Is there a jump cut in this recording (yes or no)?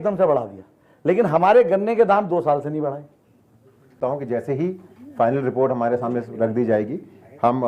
yes